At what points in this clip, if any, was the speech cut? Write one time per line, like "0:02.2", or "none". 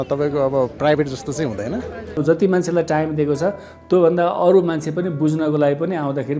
0:02.2